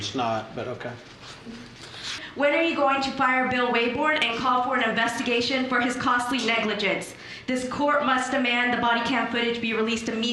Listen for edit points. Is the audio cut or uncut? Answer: cut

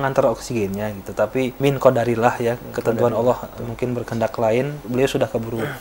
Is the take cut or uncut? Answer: cut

